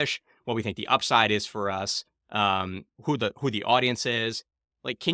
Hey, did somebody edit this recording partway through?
no; 0 cuts

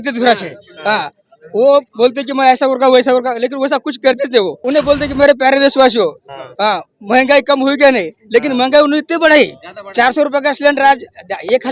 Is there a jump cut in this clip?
yes; 1 cut; at 4.6 s

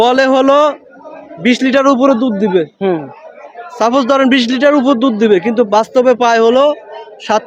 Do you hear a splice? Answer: no; 0 cuts

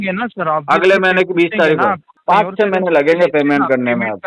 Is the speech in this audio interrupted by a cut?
yes; 1 cut; at 2.1 s

